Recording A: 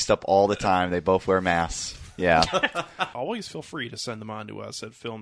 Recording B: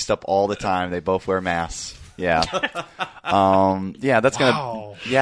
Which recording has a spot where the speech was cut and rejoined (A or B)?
A